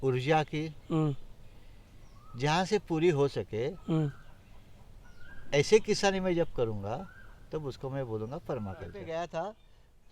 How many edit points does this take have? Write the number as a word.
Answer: one